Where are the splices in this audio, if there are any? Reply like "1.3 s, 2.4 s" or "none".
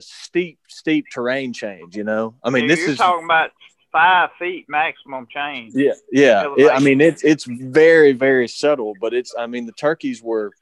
none